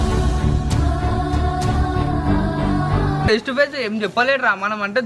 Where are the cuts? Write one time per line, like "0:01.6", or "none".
0:03.3